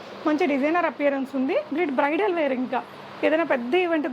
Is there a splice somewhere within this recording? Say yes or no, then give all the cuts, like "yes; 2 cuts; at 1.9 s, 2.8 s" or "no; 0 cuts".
yes; 1 cut; at 1.7 s